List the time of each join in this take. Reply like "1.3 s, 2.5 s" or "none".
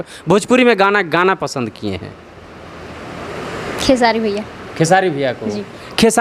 none

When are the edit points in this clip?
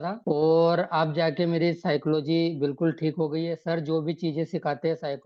none

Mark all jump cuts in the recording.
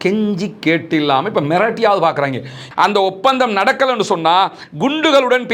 2.6 s

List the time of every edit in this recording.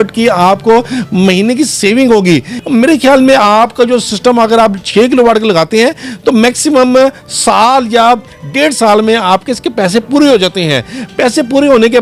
none

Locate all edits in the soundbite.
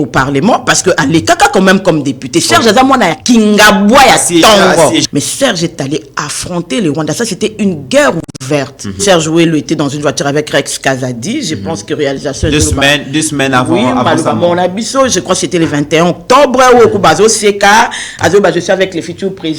5.1 s, 9.0 s

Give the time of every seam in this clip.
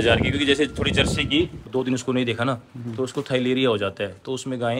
1.6 s

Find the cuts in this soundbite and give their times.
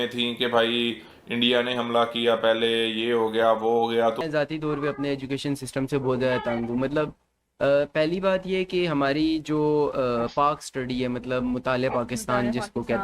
4.2 s

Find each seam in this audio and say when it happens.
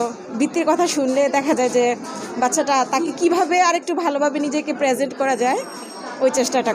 none

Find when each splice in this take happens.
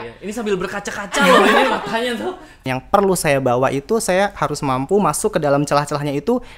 2.7 s

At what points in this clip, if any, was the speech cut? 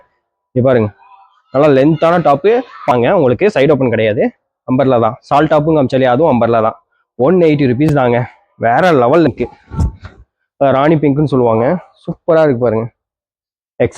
2.9 s, 9.3 s

